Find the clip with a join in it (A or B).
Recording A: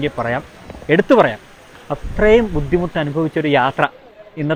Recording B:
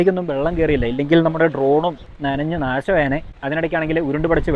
B